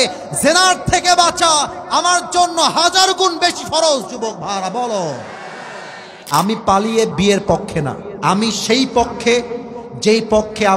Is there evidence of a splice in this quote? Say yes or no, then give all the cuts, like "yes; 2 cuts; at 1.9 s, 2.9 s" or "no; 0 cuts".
yes; 2 cuts; at 6.2 s, 8.1 s